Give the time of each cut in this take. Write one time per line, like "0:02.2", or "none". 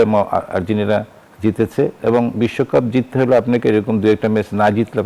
0:01.2